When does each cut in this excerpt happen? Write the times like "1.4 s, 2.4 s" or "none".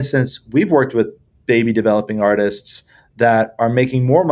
none